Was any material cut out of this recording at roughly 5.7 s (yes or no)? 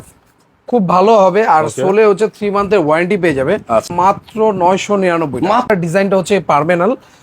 yes